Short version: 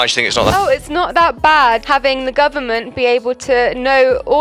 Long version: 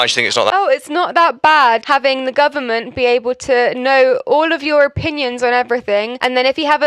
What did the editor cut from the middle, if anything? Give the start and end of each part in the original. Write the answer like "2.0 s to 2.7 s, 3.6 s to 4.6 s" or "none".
none